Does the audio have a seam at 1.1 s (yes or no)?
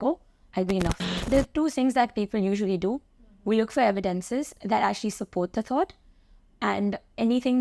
yes